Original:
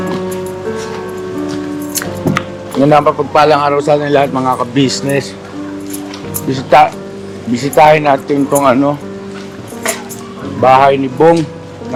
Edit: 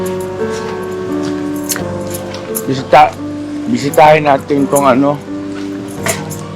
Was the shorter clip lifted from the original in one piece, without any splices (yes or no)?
no